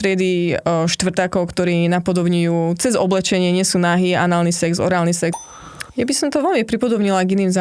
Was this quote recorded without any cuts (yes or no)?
no